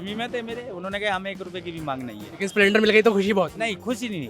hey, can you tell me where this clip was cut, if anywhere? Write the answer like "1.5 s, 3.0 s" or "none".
2.2 s